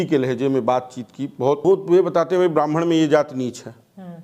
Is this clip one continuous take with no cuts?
no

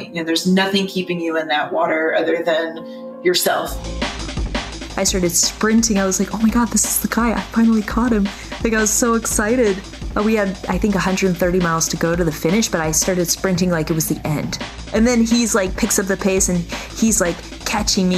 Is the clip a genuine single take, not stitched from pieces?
no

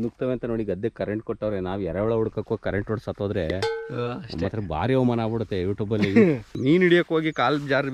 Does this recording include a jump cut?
yes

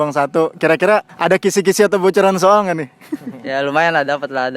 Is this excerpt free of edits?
no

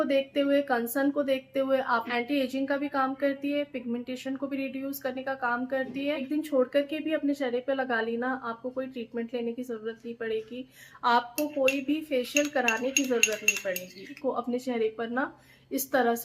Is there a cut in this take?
yes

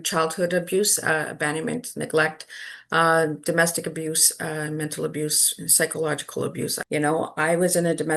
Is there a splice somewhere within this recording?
yes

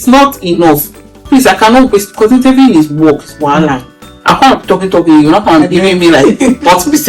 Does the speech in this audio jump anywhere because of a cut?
no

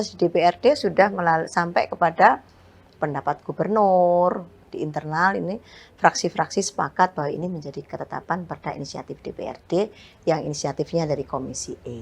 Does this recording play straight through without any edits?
no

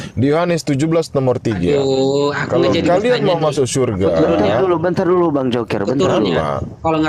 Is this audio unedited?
yes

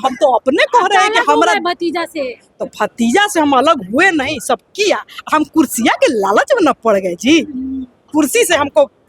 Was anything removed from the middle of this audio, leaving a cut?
yes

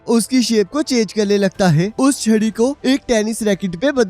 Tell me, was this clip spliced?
yes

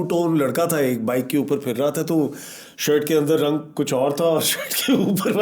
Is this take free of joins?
yes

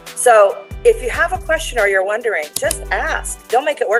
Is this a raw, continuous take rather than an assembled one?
yes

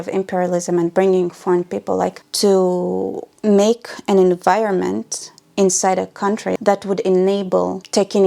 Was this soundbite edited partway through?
yes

